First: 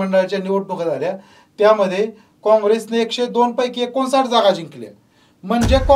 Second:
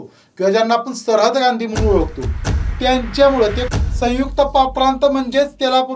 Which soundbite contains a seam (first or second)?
second